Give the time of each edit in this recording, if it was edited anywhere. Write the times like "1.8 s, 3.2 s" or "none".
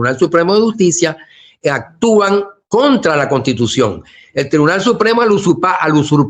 none